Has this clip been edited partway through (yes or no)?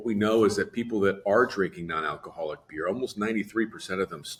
no